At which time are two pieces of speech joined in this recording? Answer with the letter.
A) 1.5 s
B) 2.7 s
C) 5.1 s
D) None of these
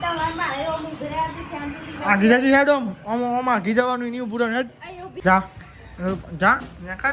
C